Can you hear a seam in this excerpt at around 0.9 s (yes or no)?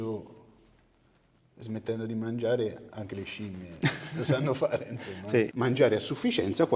no